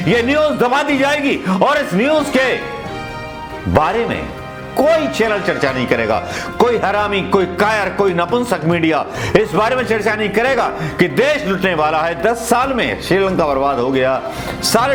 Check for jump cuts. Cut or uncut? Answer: uncut